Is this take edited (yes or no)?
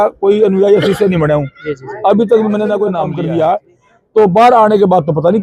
yes